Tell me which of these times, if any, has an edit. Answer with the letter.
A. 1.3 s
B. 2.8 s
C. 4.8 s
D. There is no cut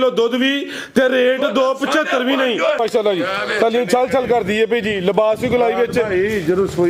B